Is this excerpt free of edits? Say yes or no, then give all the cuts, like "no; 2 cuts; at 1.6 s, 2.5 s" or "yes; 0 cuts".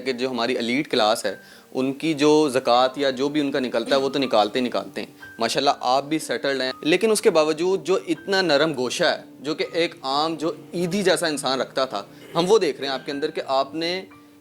no; 1 cut; at 6.7 s